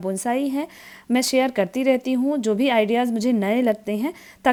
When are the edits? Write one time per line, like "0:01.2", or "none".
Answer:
none